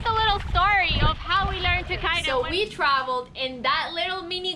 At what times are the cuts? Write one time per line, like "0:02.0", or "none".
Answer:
0:02.2